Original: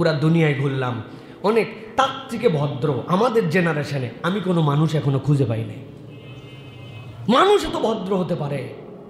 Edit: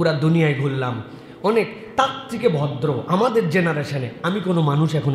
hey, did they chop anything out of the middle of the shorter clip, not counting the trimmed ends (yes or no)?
no